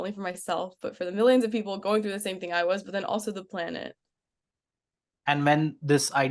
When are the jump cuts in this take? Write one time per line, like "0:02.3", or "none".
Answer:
none